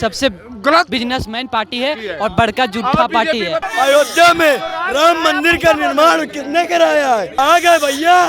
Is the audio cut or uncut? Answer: cut